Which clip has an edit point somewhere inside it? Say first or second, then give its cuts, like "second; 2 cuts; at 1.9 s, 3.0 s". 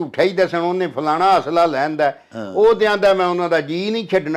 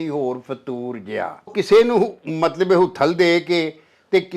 second; 1 cut; at 1.5 s